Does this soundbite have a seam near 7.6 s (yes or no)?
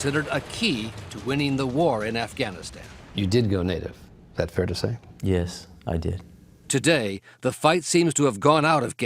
yes